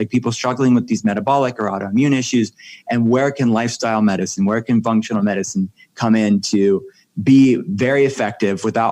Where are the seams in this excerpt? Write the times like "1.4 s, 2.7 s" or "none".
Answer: none